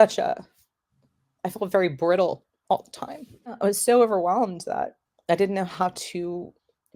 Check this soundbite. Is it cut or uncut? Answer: uncut